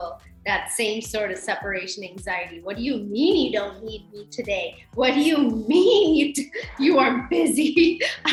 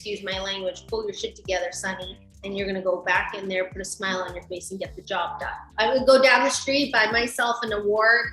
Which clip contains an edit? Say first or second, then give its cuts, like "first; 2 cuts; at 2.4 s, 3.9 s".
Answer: second; 1 cut; at 5.6 s